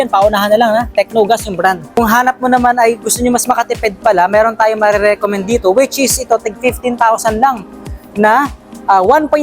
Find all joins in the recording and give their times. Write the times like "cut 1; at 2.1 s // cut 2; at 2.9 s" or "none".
cut 1; at 2.0 s